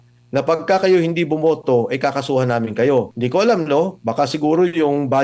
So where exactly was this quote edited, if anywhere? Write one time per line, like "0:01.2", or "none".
0:03.2